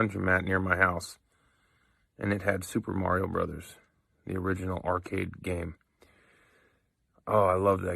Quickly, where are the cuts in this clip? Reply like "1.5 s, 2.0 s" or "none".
4.1 s, 5.3 s